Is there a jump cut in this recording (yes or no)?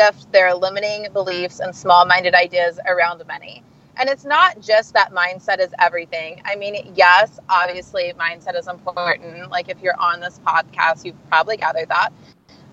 no